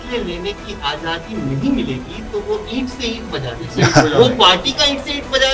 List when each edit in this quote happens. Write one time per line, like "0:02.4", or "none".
none